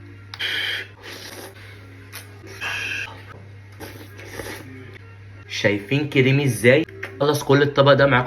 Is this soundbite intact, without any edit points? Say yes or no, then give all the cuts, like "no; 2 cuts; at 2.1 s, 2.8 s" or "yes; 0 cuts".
no; 3 cuts; at 1.3 s, 2.6 s, 7.0 s